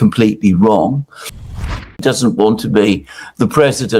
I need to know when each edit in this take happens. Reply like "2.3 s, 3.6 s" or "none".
1.6 s